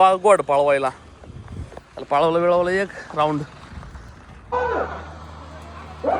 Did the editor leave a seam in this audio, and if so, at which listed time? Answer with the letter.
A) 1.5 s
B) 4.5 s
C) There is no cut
B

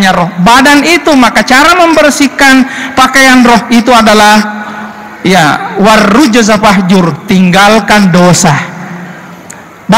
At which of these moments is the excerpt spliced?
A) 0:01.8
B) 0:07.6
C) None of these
C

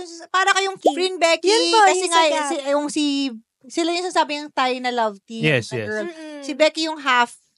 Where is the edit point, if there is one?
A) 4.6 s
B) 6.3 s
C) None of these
C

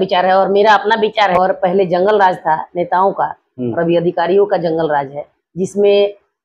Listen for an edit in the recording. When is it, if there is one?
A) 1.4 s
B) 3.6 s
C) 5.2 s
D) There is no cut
A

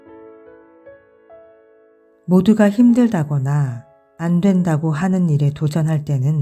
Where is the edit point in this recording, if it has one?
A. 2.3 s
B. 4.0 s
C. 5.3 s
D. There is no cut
A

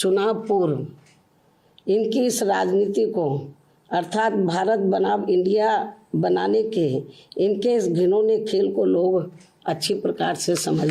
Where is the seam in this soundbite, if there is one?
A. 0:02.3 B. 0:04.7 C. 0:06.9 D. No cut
D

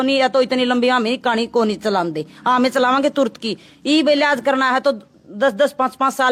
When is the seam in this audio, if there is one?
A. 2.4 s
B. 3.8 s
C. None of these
C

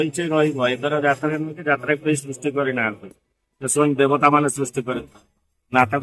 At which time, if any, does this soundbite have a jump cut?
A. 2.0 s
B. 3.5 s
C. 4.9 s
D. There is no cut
D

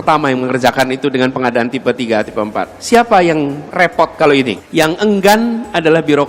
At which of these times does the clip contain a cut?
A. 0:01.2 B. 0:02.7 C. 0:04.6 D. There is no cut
C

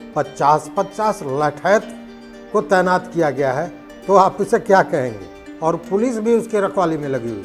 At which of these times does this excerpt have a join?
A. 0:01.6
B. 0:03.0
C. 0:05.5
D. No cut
C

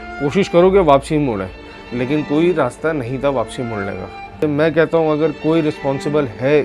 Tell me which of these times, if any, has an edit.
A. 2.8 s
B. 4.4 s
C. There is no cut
B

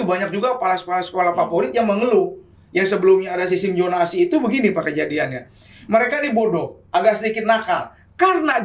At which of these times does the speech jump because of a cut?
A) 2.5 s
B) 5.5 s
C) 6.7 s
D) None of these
D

